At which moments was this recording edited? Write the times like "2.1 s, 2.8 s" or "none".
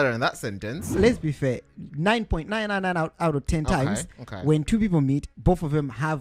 1.0 s

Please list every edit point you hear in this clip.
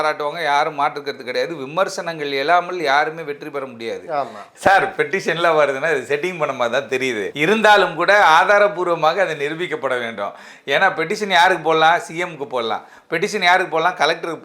4.4 s, 7.3 s

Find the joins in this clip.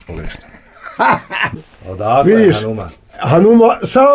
1.4 s

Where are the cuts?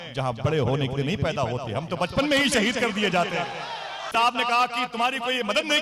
4.1 s

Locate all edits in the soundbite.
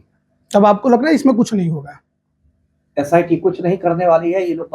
none

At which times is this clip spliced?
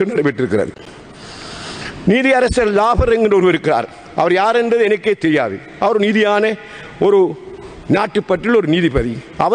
none

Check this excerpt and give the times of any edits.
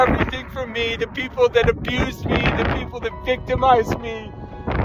none

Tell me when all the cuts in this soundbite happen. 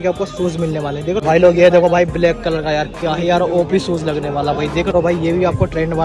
1.2 s, 4.9 s

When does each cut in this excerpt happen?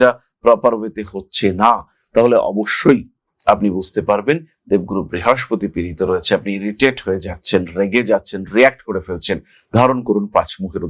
none

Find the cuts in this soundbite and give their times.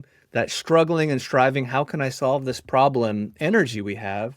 none

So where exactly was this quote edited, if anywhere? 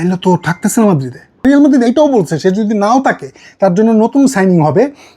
1.4 s

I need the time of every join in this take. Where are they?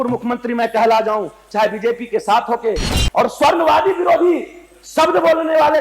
2.9 s

